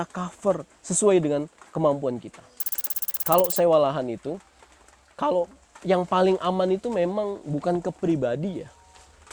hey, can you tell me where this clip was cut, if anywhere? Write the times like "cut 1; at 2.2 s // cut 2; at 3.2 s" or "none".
cut 1; at 3.1 s